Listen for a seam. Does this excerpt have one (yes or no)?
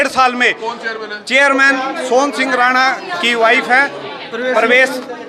no